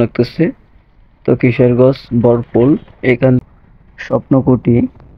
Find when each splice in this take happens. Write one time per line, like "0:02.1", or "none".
0:03.4